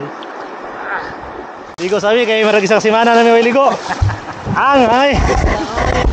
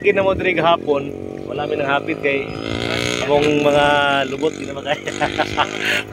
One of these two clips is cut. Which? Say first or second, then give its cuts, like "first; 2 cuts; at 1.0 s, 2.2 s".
first; 1 cut; at 1.7 s